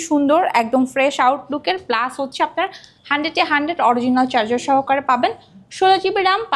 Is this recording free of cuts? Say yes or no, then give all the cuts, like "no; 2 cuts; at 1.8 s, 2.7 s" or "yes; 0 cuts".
yes; 0 cuts